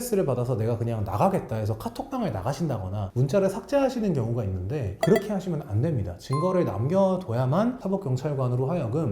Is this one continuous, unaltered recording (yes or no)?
no